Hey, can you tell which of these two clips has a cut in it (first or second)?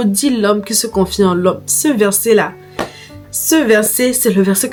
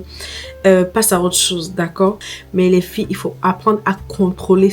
second